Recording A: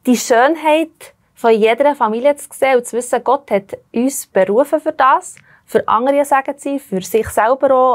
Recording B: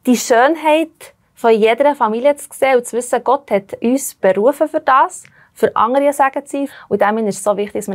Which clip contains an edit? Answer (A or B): B